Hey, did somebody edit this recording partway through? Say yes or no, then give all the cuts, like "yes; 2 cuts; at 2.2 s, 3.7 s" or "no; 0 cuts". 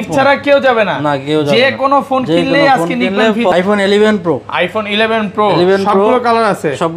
yes; 1 cut; at 3.5 s